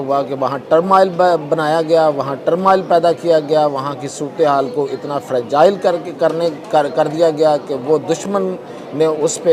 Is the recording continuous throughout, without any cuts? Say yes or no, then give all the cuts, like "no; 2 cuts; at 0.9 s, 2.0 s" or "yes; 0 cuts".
yes; 0 cuts